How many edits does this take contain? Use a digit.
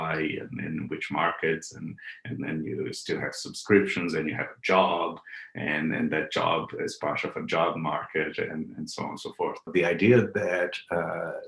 1